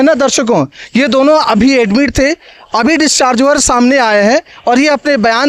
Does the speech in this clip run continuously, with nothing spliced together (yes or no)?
yes